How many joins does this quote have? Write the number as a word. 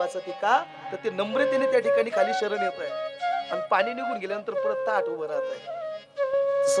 one